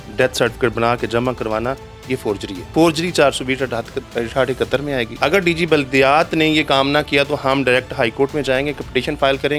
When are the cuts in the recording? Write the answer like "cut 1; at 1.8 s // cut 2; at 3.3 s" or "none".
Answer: cut 1; at 2.6 s // cut 2; at 5.1 s